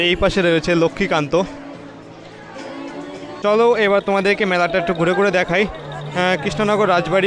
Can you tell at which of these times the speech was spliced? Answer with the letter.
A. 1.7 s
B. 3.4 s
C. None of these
B